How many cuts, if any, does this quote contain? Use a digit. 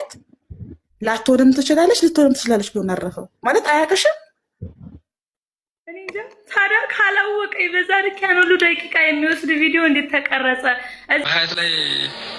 1